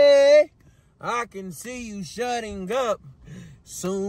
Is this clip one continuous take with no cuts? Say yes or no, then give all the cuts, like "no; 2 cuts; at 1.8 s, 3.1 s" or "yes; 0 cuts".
yes; 0 cuts